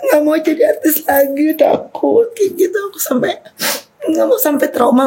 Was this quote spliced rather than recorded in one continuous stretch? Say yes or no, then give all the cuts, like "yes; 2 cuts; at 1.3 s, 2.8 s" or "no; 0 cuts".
no; 0 cuts